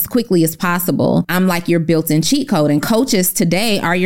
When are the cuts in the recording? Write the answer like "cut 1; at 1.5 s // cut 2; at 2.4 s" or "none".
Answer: cut 1; at 1.3 s